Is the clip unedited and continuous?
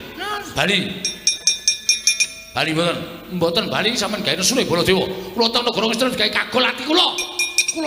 yes; 0 cuts

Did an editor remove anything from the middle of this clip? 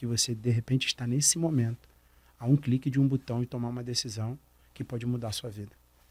no; 0 cuts

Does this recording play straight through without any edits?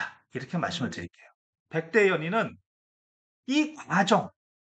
no; 1 cut; at 1.3 s

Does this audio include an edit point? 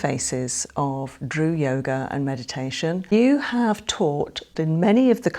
yes; 2 cuts; at 3.1 s, 4.5 s

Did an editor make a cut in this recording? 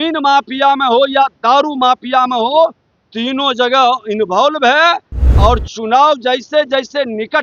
no; 0 cuts

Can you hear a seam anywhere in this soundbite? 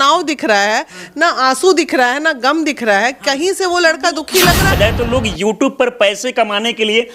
yes; 1 cut; at 4.7 s

